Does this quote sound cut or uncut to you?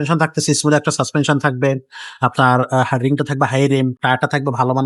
uncut